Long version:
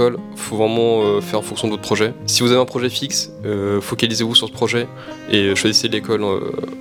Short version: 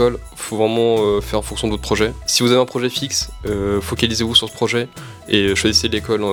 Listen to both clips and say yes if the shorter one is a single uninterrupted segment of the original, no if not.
yes